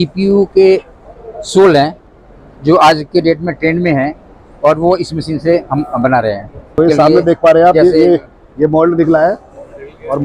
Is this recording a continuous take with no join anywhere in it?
no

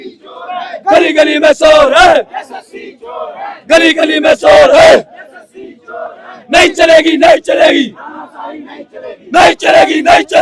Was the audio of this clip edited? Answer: no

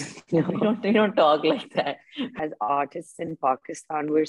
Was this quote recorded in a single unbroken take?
no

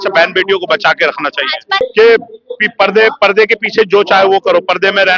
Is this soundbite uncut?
no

